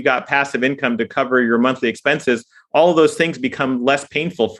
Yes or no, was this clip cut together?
no